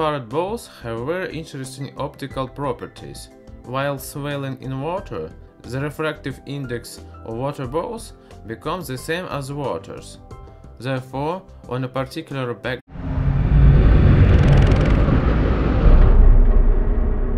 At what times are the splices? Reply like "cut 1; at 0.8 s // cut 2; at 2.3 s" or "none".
none